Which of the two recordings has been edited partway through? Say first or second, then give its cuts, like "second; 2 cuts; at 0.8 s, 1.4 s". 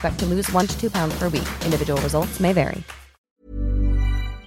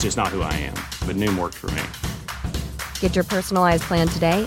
first; 1 cut; at 3.4 s